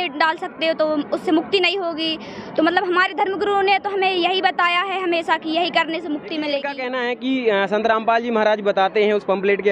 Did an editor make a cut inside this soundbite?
yes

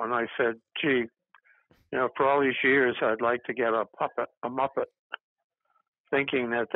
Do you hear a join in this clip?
no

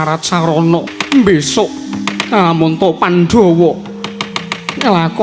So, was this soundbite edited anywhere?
yes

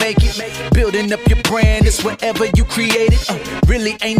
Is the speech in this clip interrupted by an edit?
no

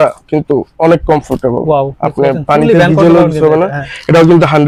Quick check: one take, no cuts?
yes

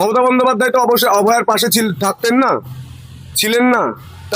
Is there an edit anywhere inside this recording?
no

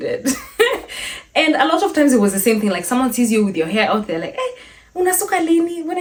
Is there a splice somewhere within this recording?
no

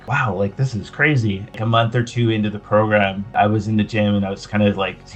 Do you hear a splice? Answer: yes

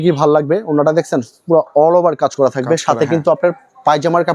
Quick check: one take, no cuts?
yes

